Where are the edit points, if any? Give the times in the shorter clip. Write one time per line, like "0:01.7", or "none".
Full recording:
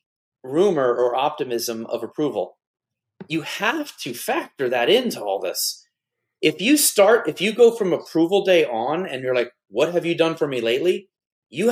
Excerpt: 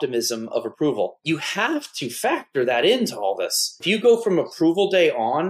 0:01.2
0:03.8